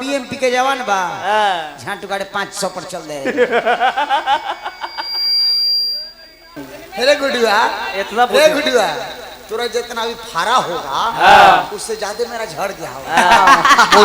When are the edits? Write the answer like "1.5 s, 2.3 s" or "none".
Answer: 6.7 s